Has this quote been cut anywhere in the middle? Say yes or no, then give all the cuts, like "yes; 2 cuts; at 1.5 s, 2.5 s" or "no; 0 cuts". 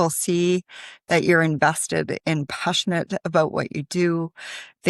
no; 0 cuts